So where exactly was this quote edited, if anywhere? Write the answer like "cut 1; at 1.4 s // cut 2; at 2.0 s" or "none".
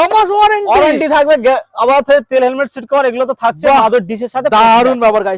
none